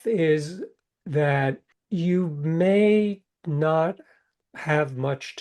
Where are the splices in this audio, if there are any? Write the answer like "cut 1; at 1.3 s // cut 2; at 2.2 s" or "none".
cut 1; at 1.7 s // cut 2; at 4.4 s